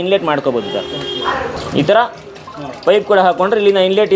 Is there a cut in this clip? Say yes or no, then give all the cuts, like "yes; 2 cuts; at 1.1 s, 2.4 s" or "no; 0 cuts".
no; 0 cuts